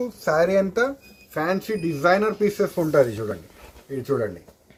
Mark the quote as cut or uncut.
uncut